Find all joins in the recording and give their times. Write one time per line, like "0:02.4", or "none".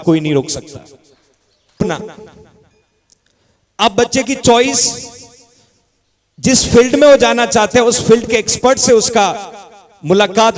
0:01.8